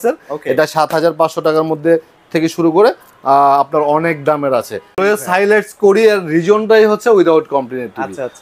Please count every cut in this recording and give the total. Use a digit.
1